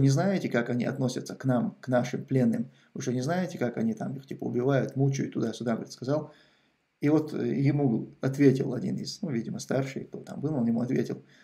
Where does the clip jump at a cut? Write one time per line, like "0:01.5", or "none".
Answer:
none